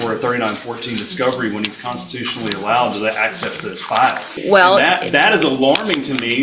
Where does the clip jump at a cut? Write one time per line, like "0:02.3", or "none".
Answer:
0:04.3